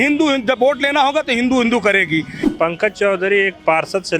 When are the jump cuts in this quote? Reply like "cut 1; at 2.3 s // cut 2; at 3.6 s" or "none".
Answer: cut 1; at 2.4 s